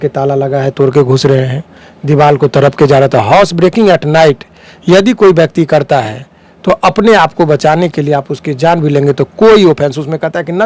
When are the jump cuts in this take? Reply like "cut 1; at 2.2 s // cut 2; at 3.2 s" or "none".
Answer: none